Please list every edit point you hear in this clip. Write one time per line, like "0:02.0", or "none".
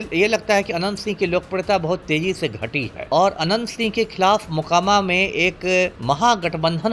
0:03.0
0:06.0